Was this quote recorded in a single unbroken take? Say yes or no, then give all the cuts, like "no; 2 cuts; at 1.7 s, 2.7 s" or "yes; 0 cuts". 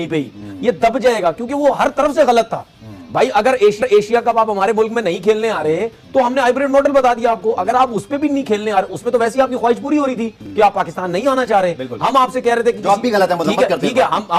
yes; 0 cuts